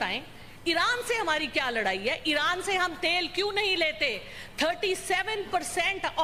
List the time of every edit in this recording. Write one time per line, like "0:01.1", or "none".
none